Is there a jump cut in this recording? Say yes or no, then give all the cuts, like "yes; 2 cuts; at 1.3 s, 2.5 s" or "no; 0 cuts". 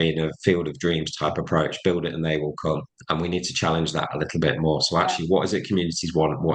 no; 0 cuts